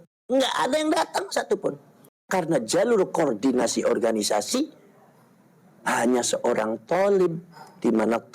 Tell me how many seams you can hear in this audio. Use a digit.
1